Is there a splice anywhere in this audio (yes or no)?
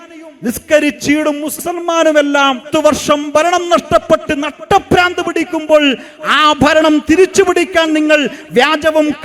yes